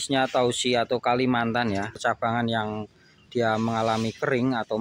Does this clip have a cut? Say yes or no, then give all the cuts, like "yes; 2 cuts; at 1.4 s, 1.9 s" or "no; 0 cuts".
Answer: yes; 1 cut; at 2.0 s